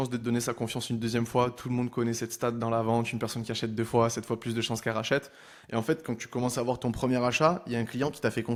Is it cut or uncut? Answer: uncut